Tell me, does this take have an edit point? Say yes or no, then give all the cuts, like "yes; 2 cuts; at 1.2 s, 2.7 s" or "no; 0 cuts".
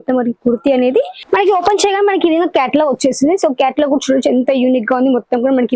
yes; 1 cut; at 1.2 s